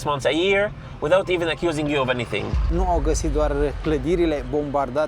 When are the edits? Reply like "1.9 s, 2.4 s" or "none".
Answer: 2.7 s